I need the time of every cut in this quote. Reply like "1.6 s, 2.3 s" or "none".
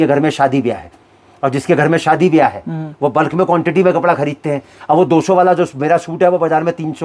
none

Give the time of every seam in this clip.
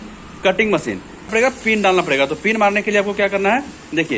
1.3 s

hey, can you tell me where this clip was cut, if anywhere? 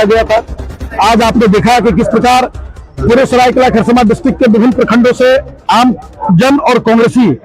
none

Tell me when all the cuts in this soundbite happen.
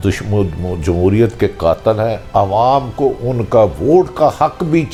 none

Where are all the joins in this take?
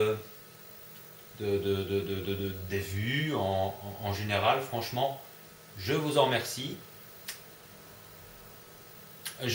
none

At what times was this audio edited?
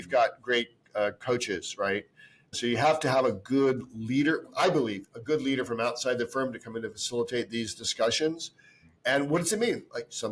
none

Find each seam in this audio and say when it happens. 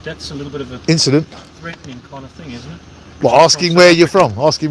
3.2 s

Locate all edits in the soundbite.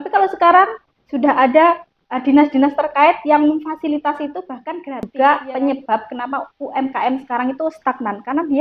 5.1 s

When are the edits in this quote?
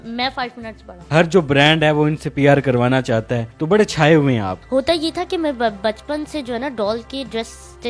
1.1 s, 4.6 s

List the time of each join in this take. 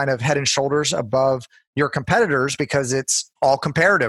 3.2 s

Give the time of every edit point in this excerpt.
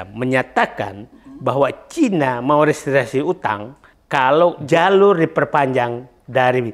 4.6 s

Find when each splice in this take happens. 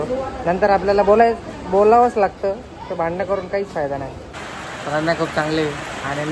4.3 s

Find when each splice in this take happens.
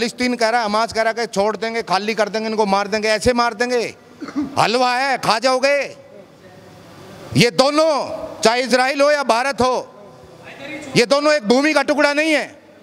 none

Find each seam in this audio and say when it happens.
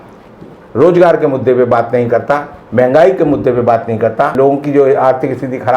4.3 s

